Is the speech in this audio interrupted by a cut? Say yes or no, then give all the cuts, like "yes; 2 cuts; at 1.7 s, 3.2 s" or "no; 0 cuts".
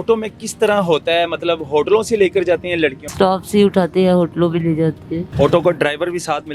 yes; 2 cuts; at 3.1 s, 5.2 s